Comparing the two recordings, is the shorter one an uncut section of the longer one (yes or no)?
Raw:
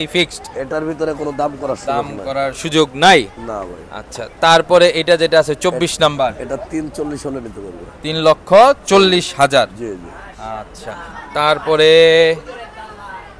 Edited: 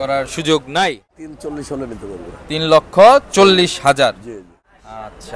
no